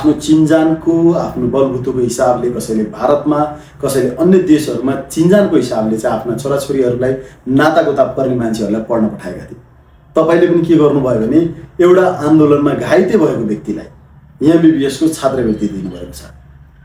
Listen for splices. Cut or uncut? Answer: uncut